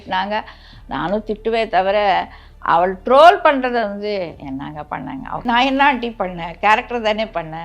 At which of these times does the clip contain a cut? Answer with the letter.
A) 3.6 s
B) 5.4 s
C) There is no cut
B